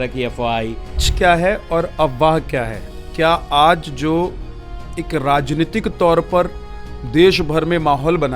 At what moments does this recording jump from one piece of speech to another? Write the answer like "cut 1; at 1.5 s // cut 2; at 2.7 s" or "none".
cut 1; at 1.1 s